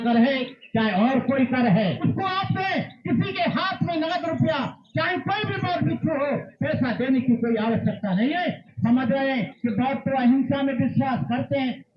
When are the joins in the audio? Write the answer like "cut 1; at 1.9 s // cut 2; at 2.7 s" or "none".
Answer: cut 1; at 2.0 s // cut 2; at 8.7 s